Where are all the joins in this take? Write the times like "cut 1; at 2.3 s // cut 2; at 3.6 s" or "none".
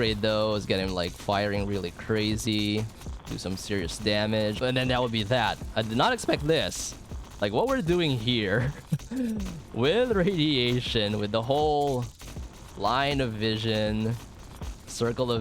cut 1; at 4.6 s